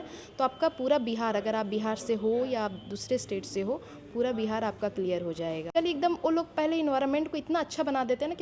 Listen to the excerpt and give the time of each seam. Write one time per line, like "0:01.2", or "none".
0:05.7